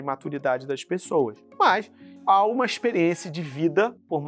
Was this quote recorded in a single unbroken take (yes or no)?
no